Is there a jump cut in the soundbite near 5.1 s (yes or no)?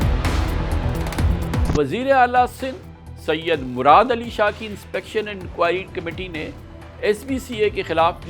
no